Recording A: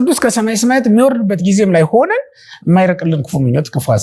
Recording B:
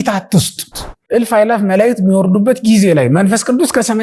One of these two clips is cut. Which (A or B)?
B